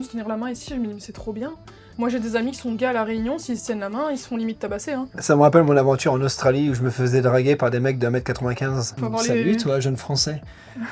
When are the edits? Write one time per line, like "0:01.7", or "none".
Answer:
0:05.1
0:08.9